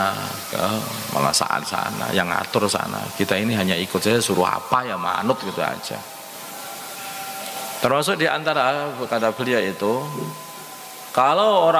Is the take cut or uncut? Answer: uncut